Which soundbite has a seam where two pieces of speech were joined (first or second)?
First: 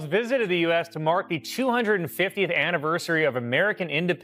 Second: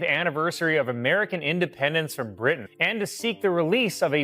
second